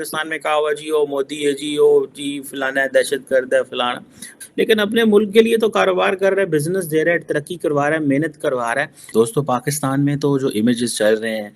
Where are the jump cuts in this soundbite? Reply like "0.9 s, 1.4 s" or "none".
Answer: 4.4 s, 9.0 s